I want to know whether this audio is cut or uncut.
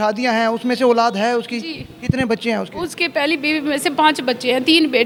uncut